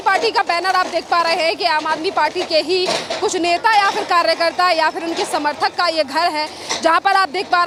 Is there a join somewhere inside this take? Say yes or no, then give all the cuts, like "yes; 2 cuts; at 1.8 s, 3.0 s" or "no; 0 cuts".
no; 0 cuts